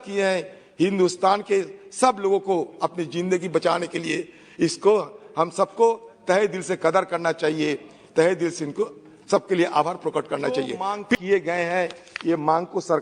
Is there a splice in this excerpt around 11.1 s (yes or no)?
yes